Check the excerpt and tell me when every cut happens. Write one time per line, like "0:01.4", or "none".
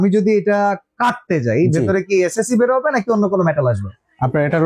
none

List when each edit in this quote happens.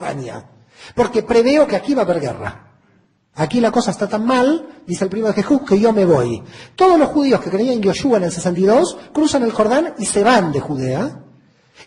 0:04.1

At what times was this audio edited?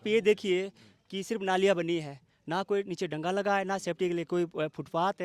none

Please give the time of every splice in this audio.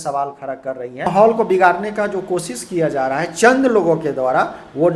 0:01.1

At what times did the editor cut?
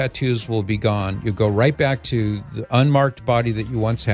none

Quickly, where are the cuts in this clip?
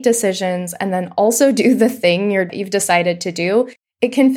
0:02.6

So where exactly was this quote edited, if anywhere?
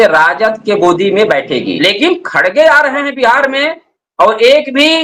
0:01.7

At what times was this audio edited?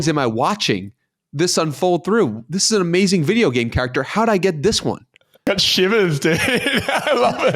0:05.4

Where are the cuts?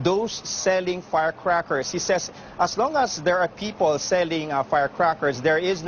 none

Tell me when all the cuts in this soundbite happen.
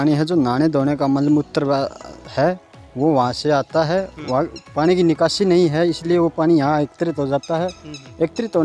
none

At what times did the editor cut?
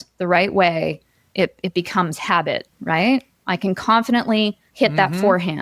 0:02.7
0:04.6

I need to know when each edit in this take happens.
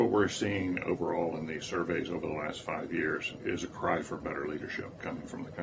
0:01.2

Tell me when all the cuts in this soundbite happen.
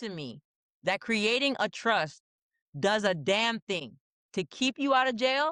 none

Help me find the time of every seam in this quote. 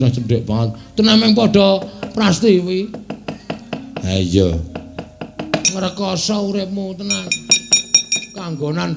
0:05.6

